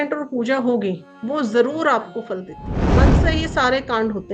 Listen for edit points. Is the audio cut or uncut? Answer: cut